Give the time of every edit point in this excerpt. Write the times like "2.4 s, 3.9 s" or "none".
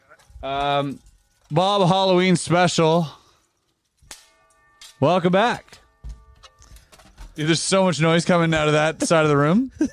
none